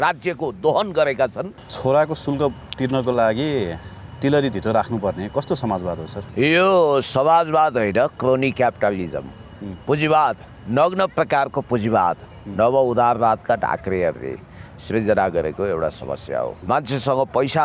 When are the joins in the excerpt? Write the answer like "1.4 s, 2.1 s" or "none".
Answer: 1.6 s, 6.2 s, 16.6 s